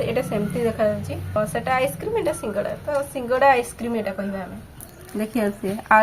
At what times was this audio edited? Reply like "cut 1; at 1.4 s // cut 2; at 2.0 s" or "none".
cut 1; at 1.4 s // cut 2; at 4.8 s